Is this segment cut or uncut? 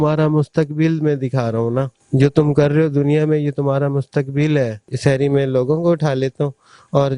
cut